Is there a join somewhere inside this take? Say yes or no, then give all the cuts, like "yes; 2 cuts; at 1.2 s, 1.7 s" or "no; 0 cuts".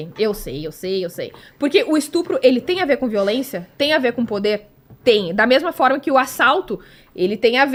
no; 0 cuts